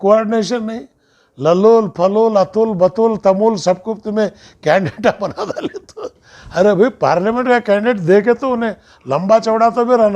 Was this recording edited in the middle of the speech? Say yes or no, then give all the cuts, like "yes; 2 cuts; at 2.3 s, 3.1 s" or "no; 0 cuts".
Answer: no; 0 cuts